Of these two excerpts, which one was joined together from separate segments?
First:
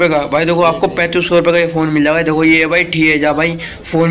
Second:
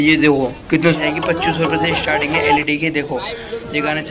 second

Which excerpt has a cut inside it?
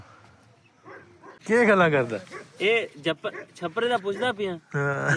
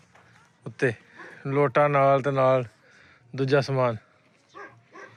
first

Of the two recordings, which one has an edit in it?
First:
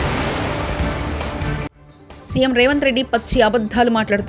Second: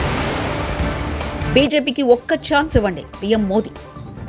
first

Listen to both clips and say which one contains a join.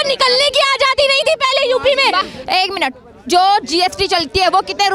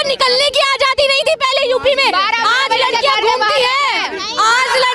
first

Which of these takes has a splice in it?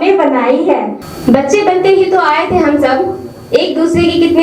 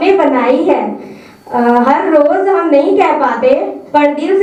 first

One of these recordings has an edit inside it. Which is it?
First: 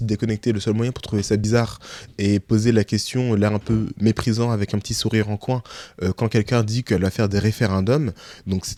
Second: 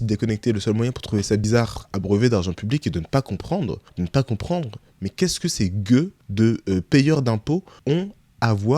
second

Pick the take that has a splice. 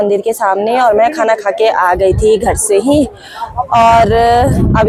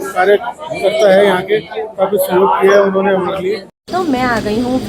second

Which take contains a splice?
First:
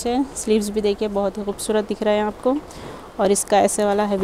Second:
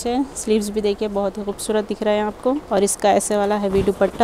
second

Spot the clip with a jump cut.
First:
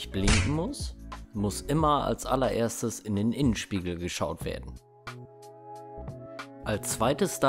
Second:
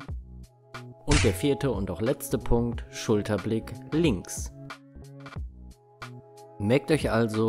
second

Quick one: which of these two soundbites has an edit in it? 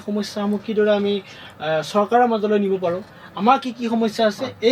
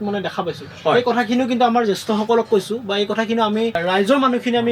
second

